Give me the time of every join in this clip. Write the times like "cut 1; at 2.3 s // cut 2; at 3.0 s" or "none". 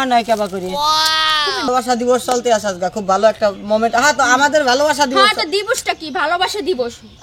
cut 1; at 1.7 s